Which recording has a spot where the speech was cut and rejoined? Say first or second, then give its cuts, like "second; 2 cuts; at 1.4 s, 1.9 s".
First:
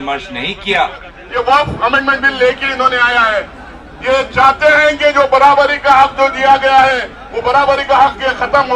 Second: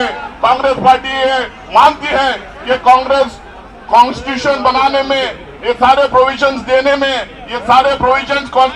first; 1 cut; at 1.2 s